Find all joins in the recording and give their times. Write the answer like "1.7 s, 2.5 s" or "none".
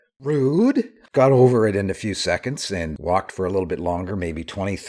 none

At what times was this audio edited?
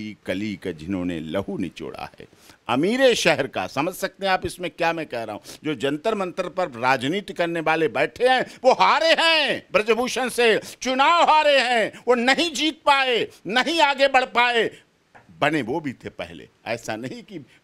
none

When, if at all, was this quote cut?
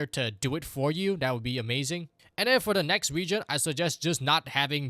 none

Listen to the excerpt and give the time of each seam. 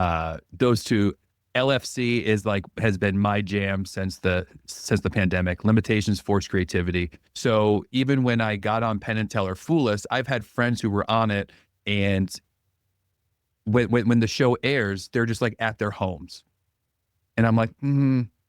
7.2 s

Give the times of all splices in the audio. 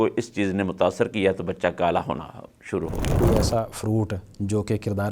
3.2 s

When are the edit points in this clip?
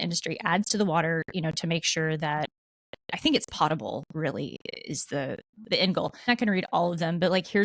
6.3 s

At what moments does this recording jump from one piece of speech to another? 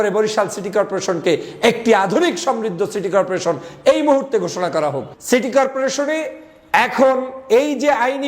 5.1 s

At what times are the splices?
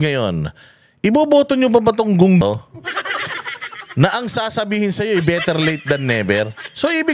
2.4 s

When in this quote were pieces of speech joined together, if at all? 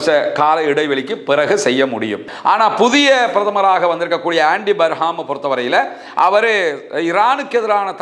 2.3 s

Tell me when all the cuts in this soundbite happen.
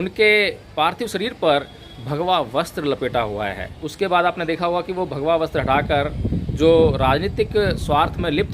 3.8 s

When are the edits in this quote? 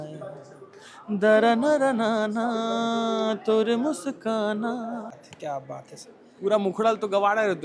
5.2 s

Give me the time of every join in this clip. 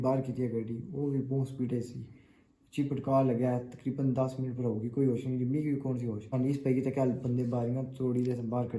6.3 s

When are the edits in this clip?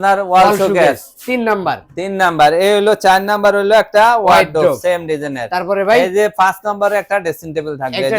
none

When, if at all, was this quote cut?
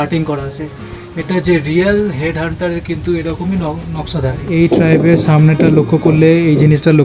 4.5 s

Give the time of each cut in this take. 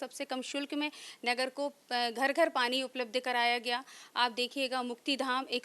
none

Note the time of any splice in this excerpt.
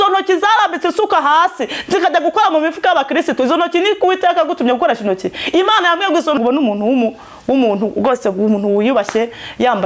6.4 s

